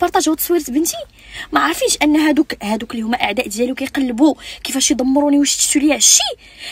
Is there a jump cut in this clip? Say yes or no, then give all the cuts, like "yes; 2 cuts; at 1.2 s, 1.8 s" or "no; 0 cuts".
no; 0 cuts